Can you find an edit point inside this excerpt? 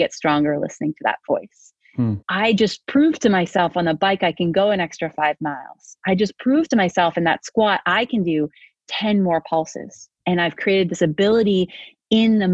yes; 1 cut; at 2.2 s

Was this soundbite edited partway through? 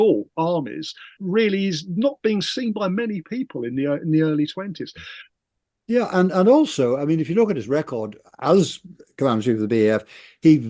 yes; 2 cuts; at 1.2 s, 5.3 s

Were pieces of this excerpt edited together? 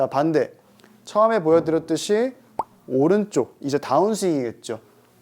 no; 0 cuts

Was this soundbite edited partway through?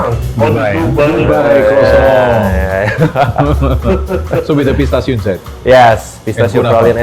no; 0 cuts

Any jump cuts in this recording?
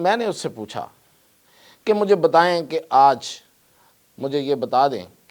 no; 0 cuts

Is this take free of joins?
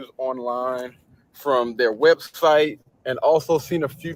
yes; 0 cuts

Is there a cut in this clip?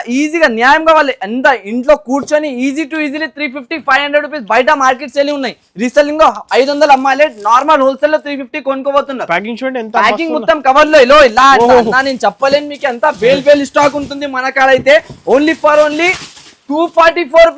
no; 0 cuts

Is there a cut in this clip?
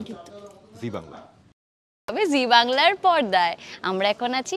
yes; 1 cut; at 2.1 s

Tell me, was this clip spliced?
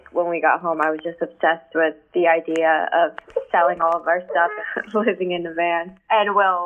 no; 0 cuts

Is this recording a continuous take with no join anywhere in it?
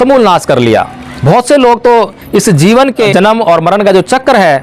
no; 1 cut; at 3.1 s

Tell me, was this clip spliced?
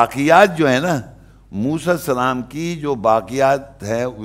no; 0 cuts

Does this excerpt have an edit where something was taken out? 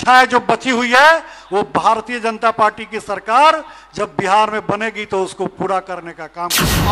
no; 0 cuts

